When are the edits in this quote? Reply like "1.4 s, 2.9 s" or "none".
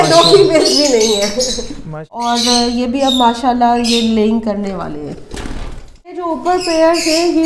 2.3 s, 6.2 s